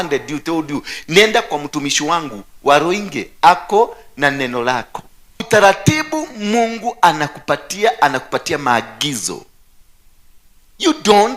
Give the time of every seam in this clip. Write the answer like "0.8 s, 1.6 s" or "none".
5.4 s